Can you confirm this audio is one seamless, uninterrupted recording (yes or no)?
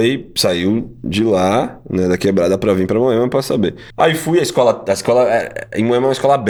yes